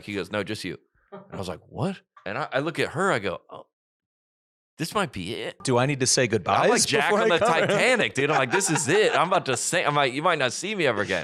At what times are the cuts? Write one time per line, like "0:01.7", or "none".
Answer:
0:02.1
0:05.6